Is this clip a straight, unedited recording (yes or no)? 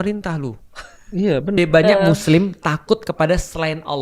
no